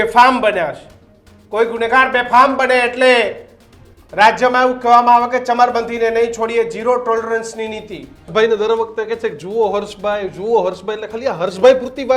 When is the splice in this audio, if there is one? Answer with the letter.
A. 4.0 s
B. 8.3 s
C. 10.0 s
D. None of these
B